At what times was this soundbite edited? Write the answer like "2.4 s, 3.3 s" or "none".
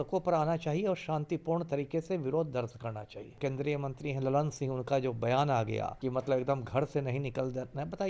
3.4 s, 5.9 s